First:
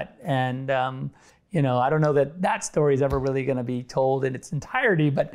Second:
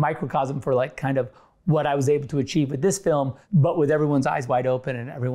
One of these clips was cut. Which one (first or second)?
second